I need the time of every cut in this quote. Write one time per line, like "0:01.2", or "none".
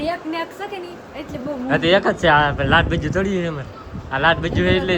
none